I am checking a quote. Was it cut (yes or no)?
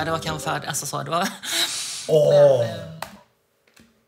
no